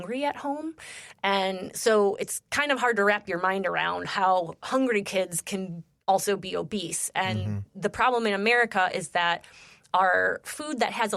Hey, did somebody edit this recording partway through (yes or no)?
no